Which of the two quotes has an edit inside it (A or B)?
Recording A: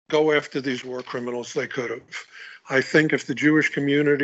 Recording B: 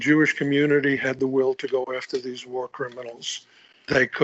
B